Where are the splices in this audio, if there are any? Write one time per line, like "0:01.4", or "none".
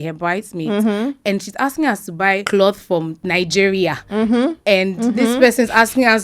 0:02.4
0:03.2